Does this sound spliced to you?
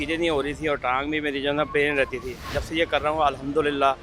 no; 0 cuts

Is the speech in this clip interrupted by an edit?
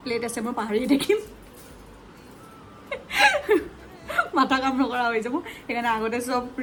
no; 0 cuts

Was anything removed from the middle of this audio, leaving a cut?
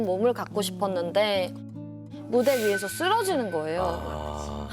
no; 0 cuts

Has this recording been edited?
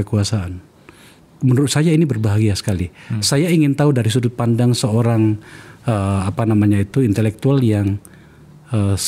no; 0 cuts

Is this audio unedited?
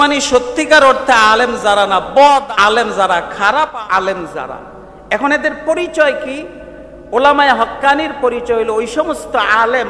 no; 2 cuts; at 2.5 s, 3.7 s

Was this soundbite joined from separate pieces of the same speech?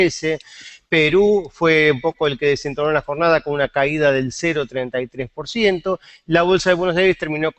yes; 1 cut; at 5.7 s

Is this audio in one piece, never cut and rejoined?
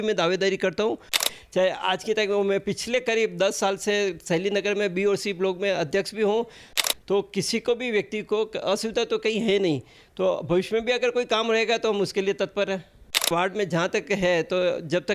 no; 3 cuts; at 1.3 s, 6.7 s, 13.2 s

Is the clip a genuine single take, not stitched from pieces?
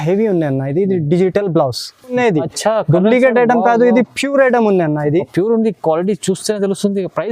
no; 1 cut; at 2.1 s

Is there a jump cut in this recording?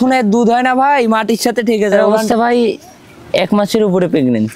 yes; 1 cut; at 2.1 s

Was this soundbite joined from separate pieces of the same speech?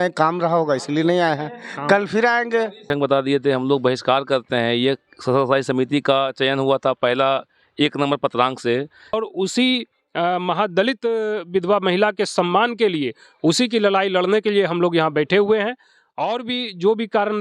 yes; 2 cuts; at 2.9 s, 9.2 s

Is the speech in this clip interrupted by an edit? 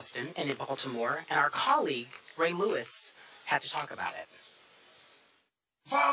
yes; 1 cut; at 1.7 s

